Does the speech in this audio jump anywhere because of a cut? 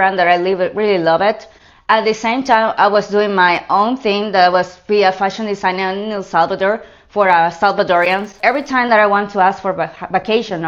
yes; 1 cut; at 8.3 s

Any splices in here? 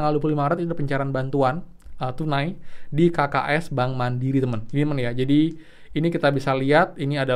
no; 0 cuts

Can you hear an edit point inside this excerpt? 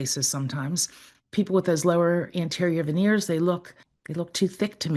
no; 0 cuts

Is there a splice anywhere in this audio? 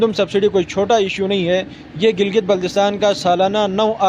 no; 0 cuts

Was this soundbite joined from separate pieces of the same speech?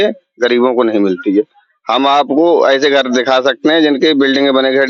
no; 0 cuts

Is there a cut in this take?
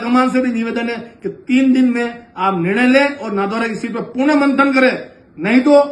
no; 0 cuts

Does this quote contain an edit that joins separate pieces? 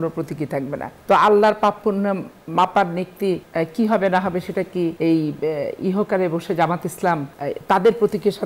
yes; 4 cuts; at 0.9 s, 3.5 s, 5.0 s, 7.3 s

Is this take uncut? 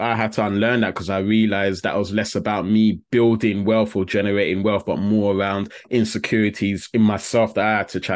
yes; 0 cuts

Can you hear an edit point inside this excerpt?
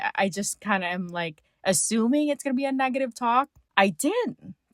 yes; 1 cut; at 3.6 s

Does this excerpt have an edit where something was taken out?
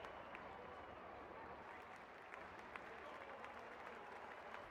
no; 0 cuts

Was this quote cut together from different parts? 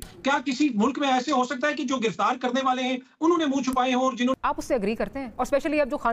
yes; 1 cut; at 4.3 s

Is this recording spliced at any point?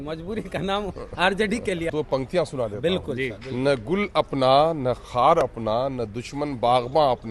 yes; 1 cut; at 1.9 s

